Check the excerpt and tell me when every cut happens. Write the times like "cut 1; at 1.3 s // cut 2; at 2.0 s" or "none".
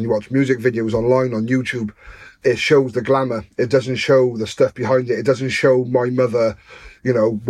cut 1; at 2.3 s